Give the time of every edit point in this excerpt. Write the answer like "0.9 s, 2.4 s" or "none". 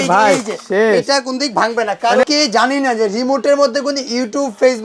2.2 s